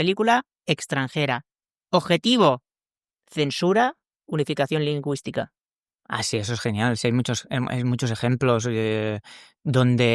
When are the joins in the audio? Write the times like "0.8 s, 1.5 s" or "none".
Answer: none